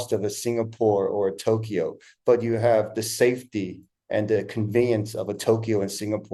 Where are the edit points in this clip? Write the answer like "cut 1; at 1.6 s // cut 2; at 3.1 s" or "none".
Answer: none